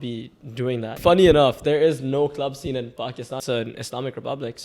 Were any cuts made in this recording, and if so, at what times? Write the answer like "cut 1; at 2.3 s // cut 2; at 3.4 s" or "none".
cut 1; at 1.0 s // cut 2; at 3.4 s